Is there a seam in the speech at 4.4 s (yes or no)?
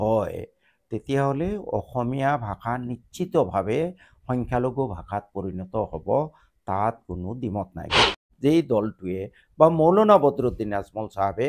no